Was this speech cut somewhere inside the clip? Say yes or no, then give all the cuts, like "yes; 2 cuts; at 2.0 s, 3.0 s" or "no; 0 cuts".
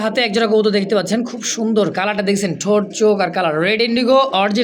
no; 0 cuts